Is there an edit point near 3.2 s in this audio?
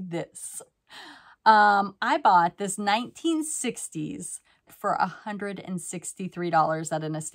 no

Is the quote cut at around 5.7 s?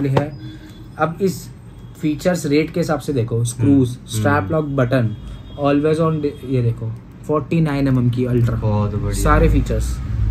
no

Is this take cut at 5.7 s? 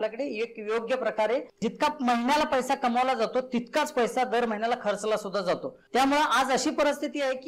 yes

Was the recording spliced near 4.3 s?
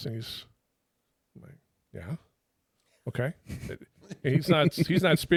no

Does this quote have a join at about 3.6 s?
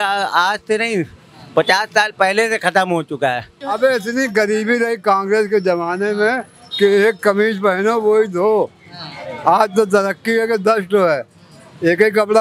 yes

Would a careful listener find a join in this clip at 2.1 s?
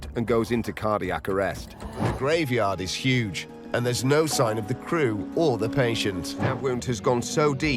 yes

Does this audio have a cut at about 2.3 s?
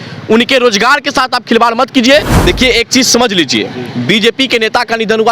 yes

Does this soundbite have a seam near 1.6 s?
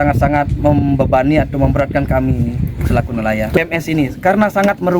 no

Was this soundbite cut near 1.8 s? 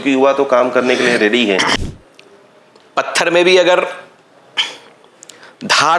yes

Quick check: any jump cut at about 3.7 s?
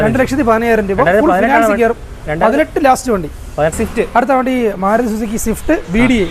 yes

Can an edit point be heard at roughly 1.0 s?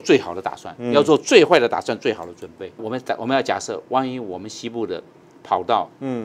no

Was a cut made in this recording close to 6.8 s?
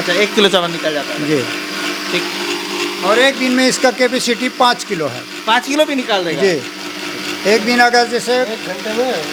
no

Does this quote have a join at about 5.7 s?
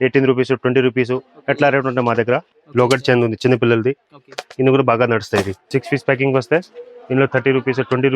yes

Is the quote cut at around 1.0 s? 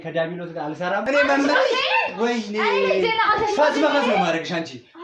yes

